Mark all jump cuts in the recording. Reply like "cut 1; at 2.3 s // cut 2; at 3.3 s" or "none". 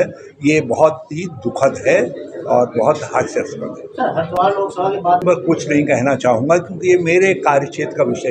none